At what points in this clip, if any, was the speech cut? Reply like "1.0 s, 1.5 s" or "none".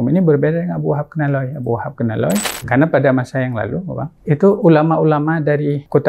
2.5 s